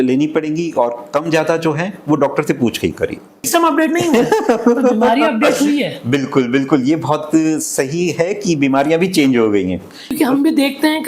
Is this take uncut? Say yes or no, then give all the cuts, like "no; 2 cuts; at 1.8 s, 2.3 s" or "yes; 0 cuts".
no; 2 cuts; at 3.5 s, 10.1 s